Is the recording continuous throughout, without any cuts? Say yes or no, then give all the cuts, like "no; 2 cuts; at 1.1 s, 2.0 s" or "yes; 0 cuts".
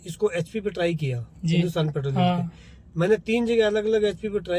yes; 0 cuts